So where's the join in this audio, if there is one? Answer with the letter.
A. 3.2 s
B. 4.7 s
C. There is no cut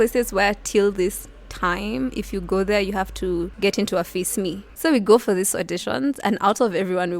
B